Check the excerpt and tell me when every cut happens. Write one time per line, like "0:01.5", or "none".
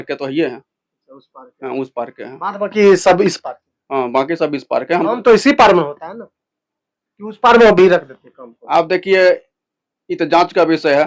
none